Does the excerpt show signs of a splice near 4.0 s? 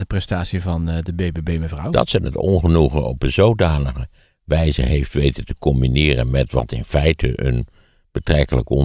no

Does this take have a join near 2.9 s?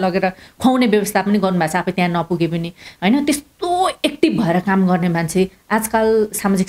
no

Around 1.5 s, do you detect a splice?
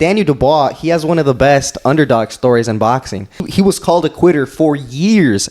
no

